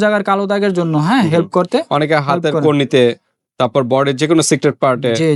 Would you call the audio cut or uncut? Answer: uncut